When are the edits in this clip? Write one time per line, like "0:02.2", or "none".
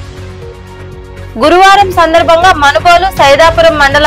none